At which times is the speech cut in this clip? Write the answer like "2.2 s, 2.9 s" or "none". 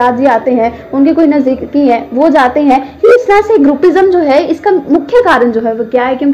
none